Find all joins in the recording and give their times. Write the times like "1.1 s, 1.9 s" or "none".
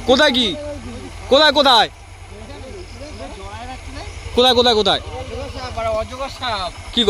none